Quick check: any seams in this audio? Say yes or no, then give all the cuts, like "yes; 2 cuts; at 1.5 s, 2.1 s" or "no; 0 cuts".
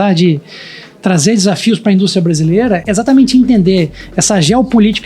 yes; 1 cut; at 2.8 s